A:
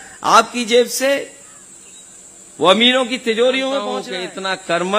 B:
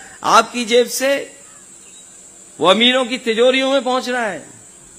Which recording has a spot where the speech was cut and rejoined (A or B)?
A